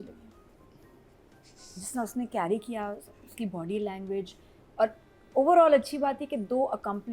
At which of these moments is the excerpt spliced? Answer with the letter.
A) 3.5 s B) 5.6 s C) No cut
C